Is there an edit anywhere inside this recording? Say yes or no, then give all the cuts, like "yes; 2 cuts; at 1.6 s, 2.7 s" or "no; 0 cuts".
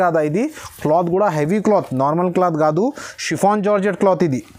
no; 0 cuts